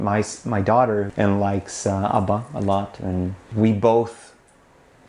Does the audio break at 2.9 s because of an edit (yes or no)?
no